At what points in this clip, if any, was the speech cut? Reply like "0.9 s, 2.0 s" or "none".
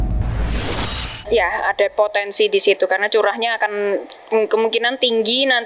none